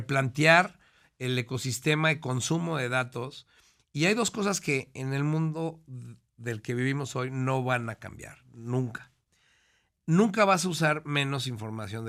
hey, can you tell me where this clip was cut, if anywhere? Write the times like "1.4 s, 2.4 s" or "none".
none